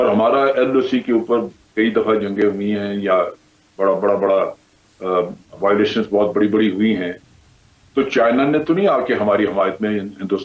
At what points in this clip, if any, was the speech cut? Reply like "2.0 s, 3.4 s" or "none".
none